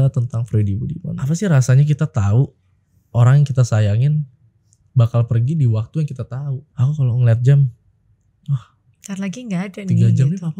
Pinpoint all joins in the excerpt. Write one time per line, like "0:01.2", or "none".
0:01.2
0:06.6